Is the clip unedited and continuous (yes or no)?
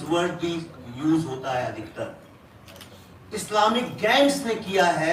yes